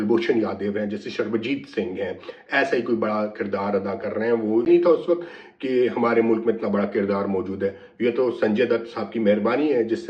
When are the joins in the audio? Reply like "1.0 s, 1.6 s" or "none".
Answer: 4.7 s